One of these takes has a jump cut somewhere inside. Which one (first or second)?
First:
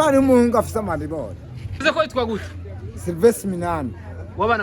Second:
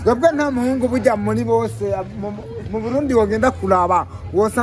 first